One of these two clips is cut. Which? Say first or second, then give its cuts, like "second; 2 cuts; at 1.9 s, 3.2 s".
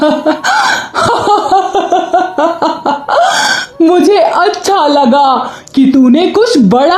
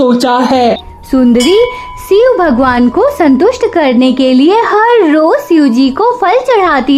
second; 1 cut; at 0.9 s